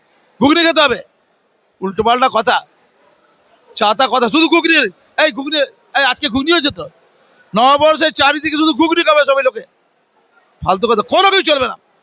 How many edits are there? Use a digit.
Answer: 0